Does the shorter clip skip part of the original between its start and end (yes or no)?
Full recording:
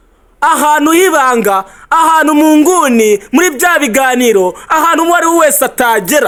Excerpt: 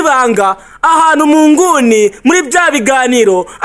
no